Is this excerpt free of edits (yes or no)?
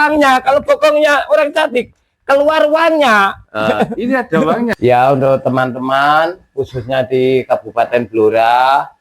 no